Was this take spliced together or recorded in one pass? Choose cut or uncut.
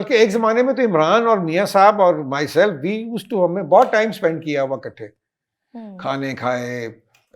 uncut